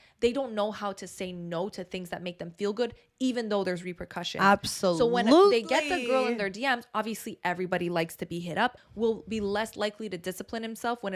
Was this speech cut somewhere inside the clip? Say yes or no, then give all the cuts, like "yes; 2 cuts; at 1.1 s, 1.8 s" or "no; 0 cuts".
yes; 1 cut; at 8.8 s